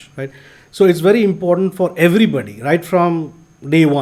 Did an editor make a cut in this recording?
no; 0 cuts

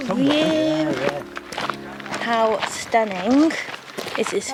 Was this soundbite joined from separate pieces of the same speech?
no; 0 cuts

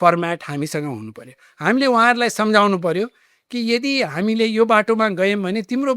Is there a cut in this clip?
no; 0 cuts

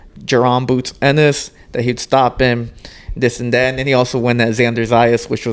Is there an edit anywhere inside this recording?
no; 0 cuts

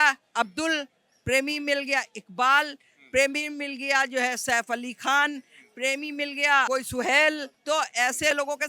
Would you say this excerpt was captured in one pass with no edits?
no; 1 cut; at 6.7 s

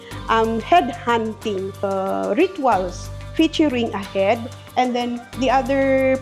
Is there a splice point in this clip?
yes; 1 cut; at 1.8 s

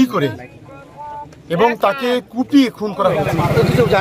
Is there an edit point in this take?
yes; 1 cut; at 3.1 s

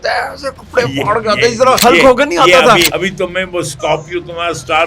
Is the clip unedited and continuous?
no; 2 cuts; at 1.8 s, 2.9 s

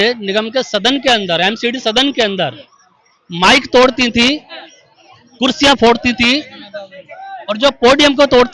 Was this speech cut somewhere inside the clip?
no; 0 cuts

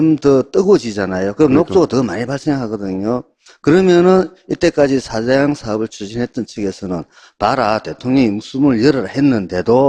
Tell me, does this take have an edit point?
yes; 1 cut; at 8.8 s

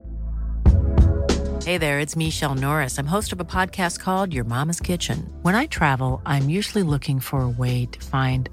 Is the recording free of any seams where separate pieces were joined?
yes; 0 cuts

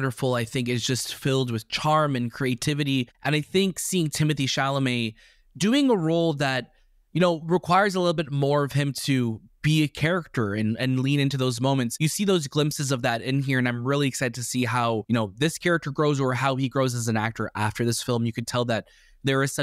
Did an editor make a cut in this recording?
yes; 3 cuts; at 3.1 s, 11.9 s, 15.0 s

